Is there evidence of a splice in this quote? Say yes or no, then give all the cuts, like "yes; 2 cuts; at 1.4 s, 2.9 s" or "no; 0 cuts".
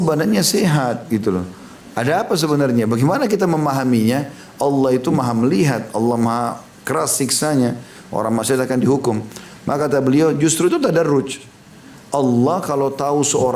no; 0 cuts